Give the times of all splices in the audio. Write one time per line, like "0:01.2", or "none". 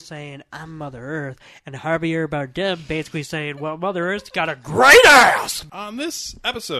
0:05.6